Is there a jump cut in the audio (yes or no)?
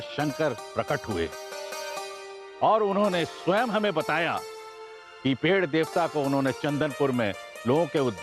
no